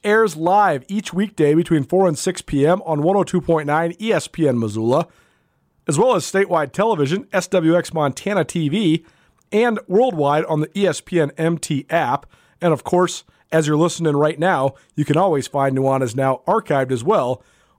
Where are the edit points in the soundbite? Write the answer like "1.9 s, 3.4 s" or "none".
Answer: none